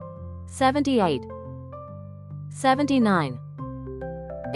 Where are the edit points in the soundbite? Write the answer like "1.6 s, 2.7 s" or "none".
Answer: 1.2 s, 2.6 s